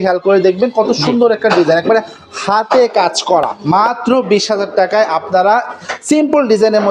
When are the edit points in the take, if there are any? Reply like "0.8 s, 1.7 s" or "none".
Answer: 3.6 s